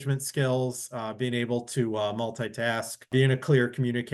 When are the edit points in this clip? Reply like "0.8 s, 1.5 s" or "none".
3.1 s